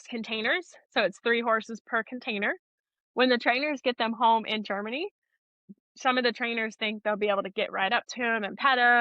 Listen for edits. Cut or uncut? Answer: cut